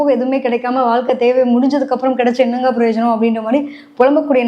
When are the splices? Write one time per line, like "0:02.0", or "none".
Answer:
none